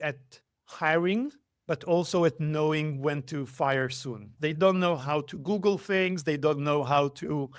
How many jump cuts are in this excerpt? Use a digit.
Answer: 1